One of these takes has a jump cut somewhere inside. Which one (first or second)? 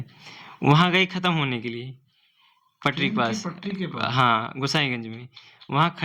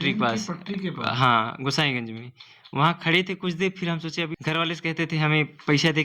second